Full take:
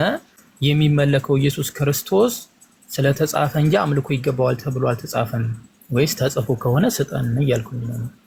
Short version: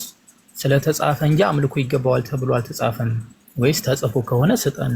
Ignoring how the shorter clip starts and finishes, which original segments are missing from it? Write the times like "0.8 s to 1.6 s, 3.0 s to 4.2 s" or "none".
none